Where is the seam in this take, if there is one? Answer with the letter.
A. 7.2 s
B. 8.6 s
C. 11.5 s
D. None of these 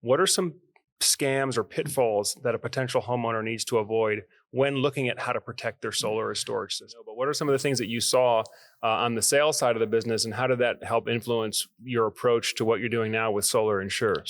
A